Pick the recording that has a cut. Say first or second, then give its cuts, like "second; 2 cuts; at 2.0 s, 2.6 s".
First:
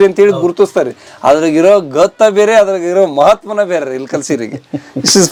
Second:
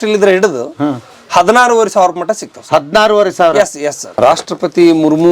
second; 1 cut; at 4.2 s